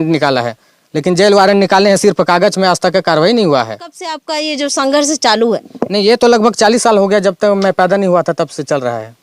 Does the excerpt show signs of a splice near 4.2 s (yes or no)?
yes